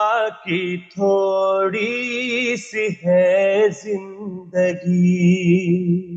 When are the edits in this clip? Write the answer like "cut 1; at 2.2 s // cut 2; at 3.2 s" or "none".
none